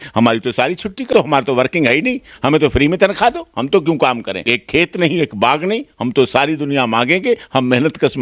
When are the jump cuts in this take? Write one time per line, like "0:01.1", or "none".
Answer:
0:01.1
0:04.4